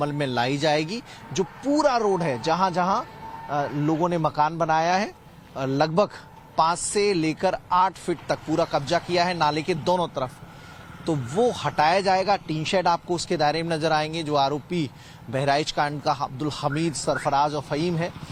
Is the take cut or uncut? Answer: uncut